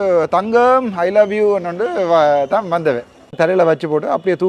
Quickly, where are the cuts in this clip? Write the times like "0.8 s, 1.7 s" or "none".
3.4 s